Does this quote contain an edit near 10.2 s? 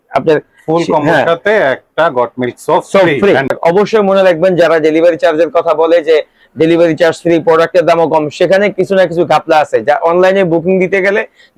no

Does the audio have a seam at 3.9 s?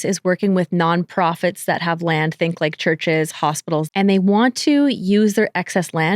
yes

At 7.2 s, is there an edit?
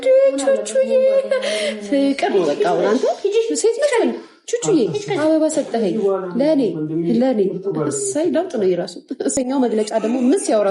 no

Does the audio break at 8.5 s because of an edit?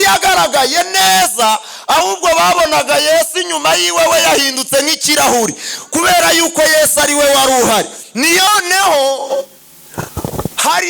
yes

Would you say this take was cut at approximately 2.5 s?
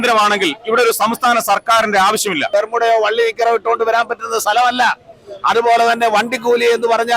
yes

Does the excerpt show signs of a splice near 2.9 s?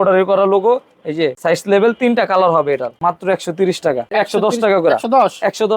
yes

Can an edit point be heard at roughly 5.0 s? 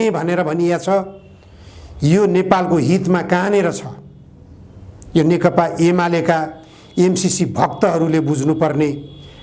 no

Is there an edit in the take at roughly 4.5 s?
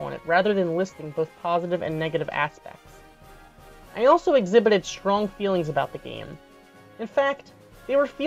no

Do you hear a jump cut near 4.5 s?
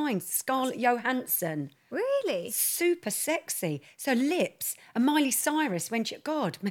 no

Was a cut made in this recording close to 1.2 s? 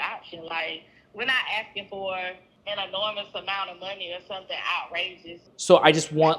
no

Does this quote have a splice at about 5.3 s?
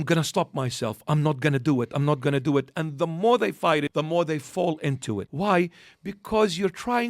yes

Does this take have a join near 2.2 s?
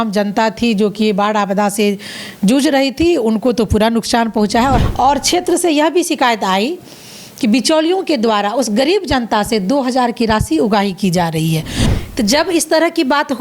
no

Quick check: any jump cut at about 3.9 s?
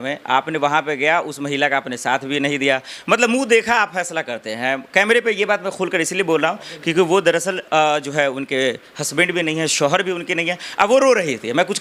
no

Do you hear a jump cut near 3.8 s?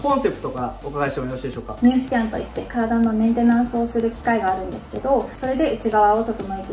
no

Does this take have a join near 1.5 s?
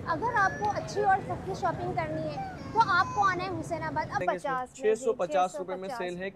no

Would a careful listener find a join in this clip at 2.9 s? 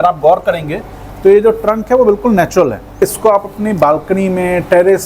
yes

